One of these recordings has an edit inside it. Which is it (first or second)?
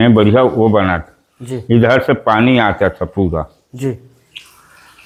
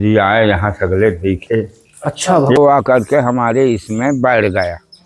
second